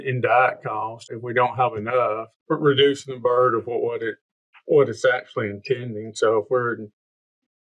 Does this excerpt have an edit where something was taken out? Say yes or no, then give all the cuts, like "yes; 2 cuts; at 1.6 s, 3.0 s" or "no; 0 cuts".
yes; 2 cuts; at 1.1 s, 2.3 s